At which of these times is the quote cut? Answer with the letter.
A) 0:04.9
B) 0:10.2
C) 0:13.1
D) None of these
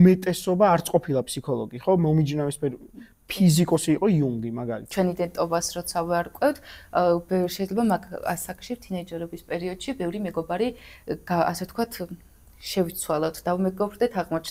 A